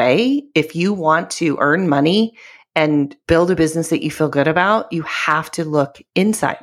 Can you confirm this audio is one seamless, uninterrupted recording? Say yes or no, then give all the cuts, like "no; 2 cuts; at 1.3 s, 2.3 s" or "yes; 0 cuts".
no; 1 cut; at 3.2 s